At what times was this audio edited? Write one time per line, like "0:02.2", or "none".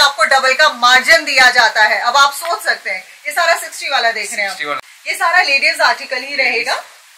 0:04.8